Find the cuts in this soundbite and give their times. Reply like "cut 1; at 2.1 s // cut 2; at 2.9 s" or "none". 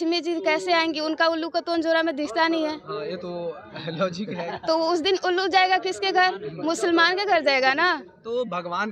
none